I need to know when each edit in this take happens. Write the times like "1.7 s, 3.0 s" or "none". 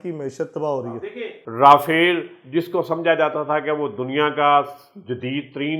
0.9 s